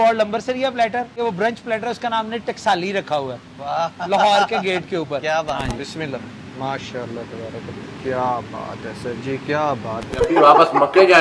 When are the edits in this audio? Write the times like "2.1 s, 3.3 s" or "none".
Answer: 1.1 s, 5.6 s, 8.0 s, 10.1 s